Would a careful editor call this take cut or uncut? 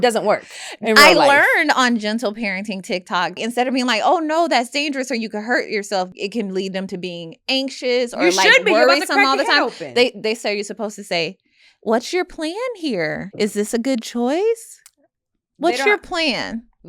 cut